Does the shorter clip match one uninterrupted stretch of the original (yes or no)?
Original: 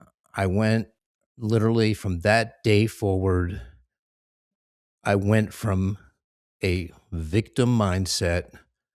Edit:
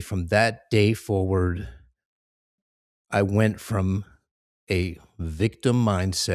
yes